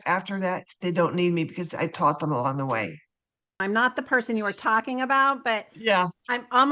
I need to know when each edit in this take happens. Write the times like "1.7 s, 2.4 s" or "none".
3.6 s